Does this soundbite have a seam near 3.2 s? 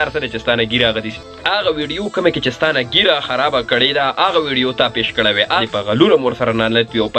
no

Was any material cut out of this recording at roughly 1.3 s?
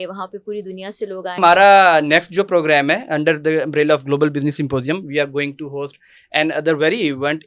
yes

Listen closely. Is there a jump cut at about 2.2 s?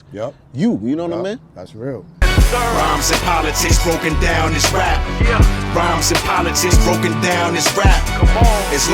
yes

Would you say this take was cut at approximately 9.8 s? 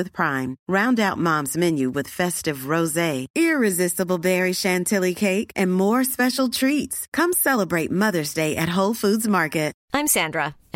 yes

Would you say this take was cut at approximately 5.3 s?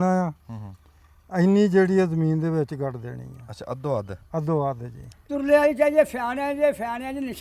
yes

